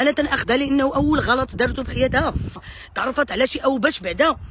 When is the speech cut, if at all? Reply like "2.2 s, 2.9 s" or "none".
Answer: 2.6 s